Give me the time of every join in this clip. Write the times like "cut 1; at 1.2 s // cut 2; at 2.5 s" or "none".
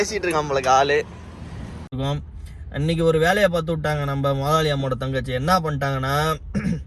cut 1; at 1.9 s